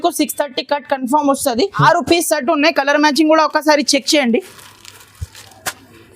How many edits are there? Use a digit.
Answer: 1